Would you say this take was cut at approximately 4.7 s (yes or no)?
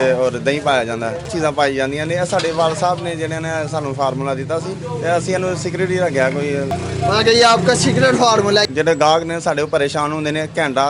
no